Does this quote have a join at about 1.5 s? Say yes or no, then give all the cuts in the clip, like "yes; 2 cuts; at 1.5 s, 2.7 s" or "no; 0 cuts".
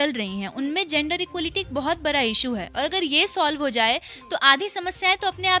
no; 0 cuts